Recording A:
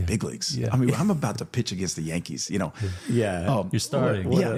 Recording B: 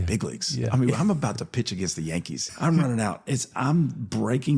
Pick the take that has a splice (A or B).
B